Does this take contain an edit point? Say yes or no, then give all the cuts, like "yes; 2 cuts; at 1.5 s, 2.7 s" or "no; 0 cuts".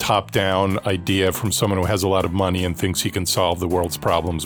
no; 0 cuts